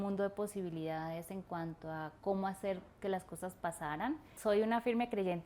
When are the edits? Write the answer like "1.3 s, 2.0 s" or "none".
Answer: 4.3 s